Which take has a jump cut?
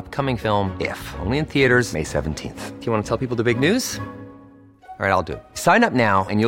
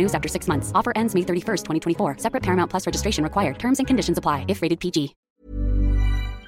second; 1 cut; at 5.3 s

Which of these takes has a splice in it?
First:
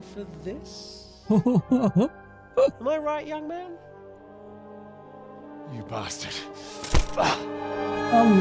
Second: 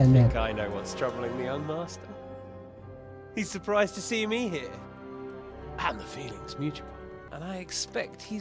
second; 1 cut; at 7.2 s

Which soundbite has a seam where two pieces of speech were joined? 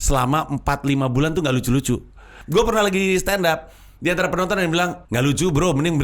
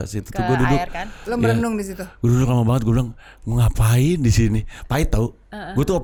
first; 2 cuts; at 2.3 s, 5.0 s

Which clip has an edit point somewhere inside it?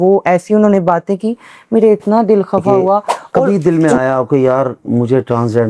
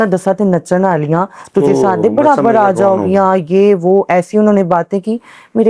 first; 1 cut; at 3.4 s

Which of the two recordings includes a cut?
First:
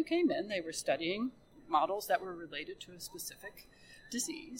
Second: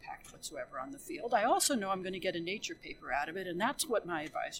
first; 1 cut; at 1.5 s

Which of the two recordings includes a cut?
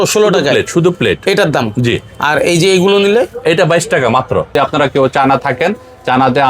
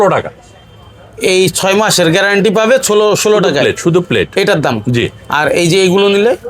first; 1 cut; at 4.5 s

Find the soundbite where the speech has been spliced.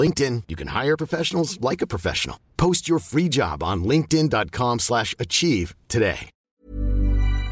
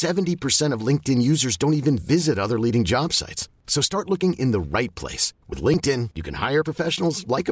first; 1 cut; at 6.5 s

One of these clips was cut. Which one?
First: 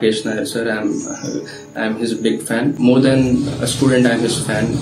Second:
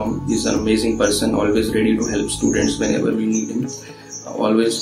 first; 1 cut; at 2.8 s

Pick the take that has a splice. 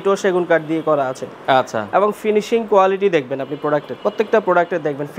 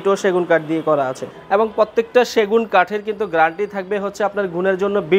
second; 1 cut; at 1.3 s

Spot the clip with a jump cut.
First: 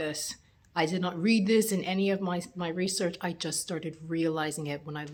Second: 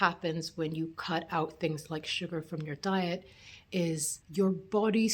second; 1 cut; at 4.2 s

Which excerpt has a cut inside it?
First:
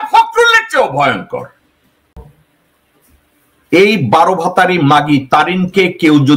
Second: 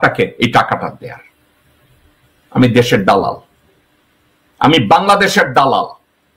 first; 1 cut; at 2.2 s

